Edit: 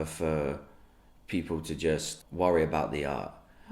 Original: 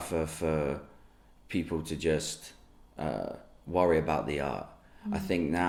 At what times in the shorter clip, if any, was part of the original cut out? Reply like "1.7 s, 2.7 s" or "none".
2.2 s